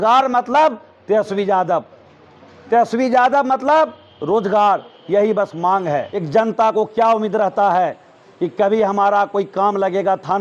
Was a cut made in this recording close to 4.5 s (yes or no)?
no